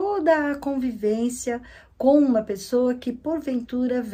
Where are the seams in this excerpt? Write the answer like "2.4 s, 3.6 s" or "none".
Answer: none